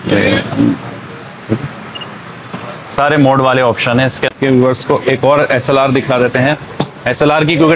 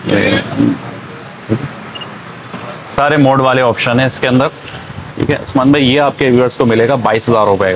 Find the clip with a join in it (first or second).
first